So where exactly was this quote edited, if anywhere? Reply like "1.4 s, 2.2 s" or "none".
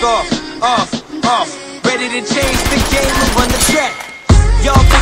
none